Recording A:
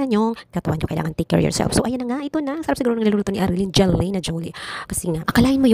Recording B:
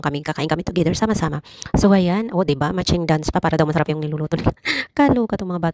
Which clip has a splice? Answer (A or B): A